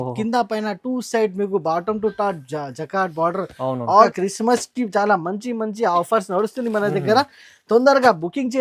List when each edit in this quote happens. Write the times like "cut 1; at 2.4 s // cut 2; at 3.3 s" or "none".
cut 1; at 4.1 s